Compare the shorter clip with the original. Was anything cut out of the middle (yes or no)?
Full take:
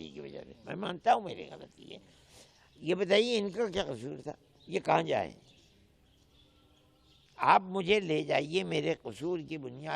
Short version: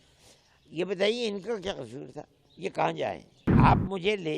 yes